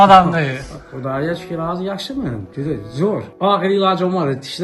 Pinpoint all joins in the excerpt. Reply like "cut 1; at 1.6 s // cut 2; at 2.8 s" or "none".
cut 1; at 3.3 s